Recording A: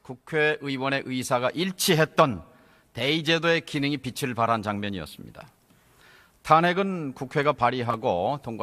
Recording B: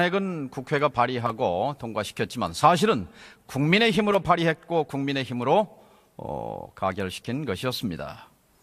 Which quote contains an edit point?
B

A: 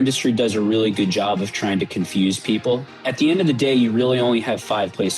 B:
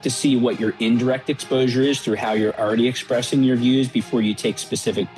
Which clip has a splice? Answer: A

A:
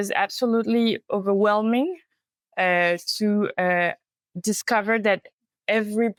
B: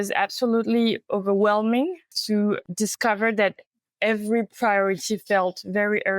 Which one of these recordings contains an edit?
B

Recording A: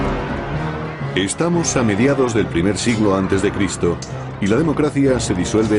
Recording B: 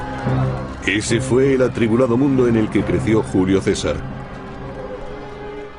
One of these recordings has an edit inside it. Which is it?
B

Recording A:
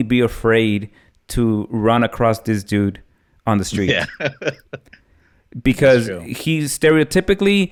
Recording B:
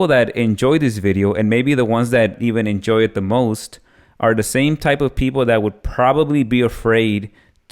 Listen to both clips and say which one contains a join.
B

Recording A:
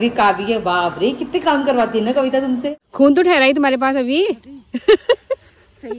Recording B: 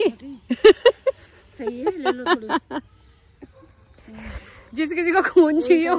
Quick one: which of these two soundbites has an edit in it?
A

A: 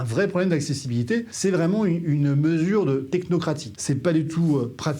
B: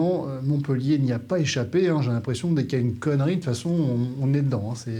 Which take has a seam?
A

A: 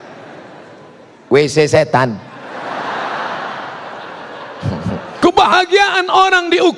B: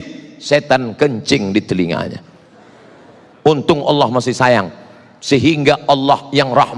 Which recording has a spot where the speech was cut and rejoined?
A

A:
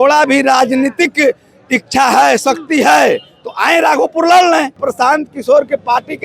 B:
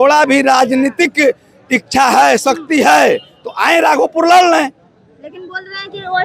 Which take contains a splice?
A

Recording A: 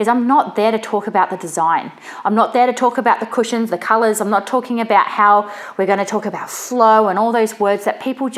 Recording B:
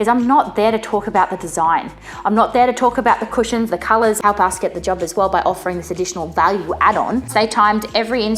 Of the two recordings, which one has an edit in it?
B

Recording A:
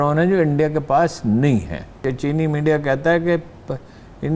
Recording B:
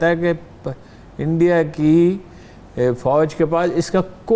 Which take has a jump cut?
A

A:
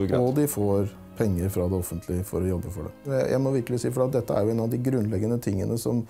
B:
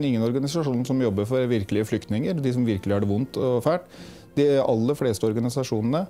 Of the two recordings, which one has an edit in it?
A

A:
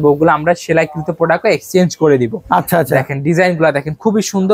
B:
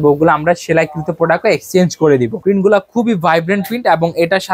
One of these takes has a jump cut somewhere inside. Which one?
B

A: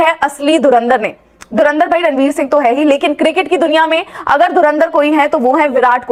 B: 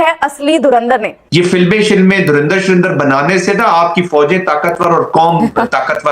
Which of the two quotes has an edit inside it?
B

